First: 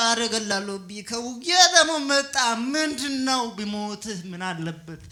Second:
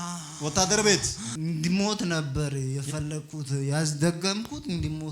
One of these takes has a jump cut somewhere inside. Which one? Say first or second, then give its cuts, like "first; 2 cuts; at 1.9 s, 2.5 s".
second; 1 cut; at 1.2 s